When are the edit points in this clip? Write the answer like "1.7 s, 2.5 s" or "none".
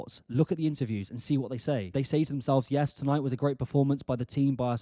1.9 s